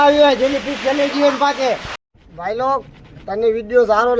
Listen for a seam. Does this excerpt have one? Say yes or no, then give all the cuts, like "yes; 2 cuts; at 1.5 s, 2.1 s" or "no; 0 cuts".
yes; 1 cut; at 2.0 s